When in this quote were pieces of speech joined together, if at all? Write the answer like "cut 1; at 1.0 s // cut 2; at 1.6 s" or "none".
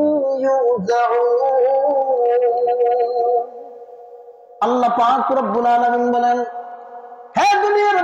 none